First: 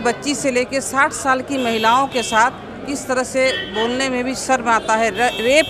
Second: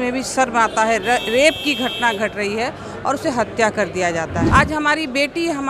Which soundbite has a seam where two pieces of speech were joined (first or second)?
second